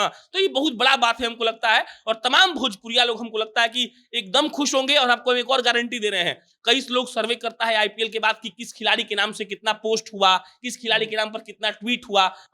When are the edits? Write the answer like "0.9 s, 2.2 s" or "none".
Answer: none